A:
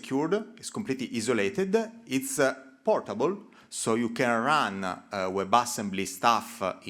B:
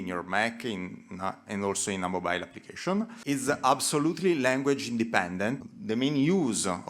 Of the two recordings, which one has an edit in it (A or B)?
B